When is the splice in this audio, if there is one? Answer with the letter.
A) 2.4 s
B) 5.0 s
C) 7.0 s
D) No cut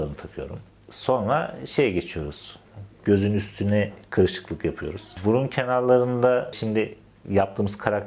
B